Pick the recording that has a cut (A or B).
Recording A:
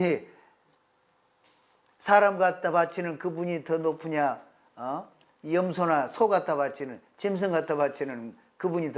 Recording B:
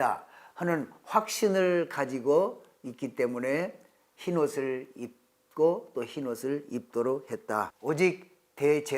B